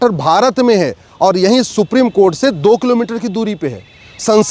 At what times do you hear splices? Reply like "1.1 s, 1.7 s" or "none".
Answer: none